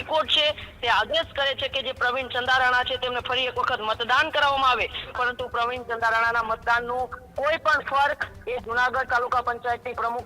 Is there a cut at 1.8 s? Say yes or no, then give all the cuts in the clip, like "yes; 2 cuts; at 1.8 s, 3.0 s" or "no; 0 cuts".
no; 1 cut; at 5.0 s